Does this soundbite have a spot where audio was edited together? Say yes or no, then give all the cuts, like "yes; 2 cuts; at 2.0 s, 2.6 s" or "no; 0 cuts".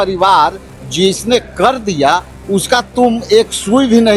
no; 0 cuts